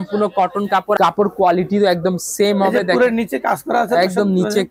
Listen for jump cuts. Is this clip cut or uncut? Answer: cut